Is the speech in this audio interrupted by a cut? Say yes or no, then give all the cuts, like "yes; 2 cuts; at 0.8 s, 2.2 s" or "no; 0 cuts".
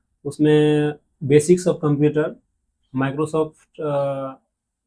no; 0 cuts